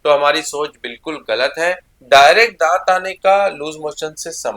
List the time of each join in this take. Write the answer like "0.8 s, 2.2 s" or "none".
1.9 s